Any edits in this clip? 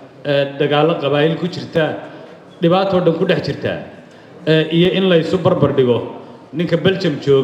no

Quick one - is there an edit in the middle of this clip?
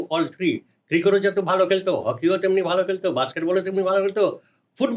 no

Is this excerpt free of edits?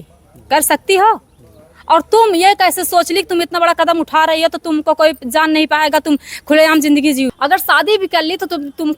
no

